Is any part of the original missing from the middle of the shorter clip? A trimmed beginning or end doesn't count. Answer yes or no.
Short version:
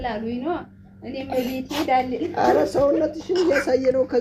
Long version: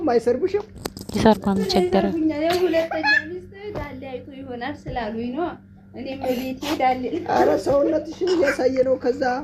no